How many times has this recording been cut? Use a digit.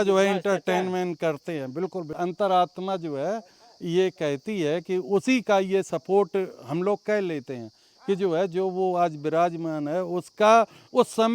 1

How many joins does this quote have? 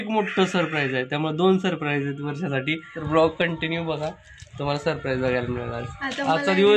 1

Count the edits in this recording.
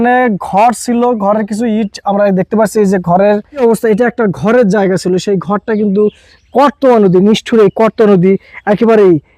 1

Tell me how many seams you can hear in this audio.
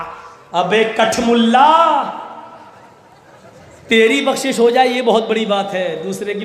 0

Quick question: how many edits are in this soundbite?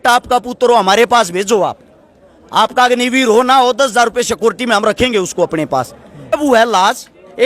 1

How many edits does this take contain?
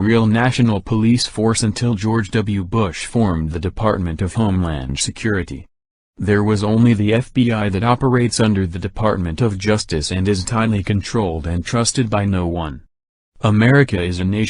1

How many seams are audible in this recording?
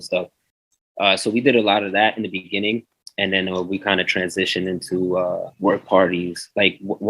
1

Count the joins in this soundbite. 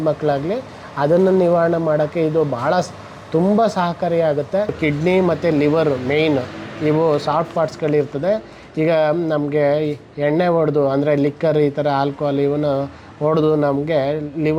1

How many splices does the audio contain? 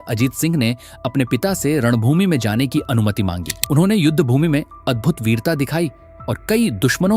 1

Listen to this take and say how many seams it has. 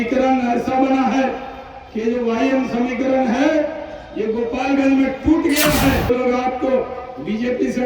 1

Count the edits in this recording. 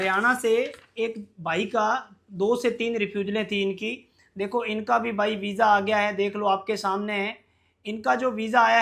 0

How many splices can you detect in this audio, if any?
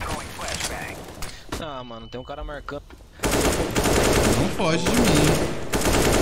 0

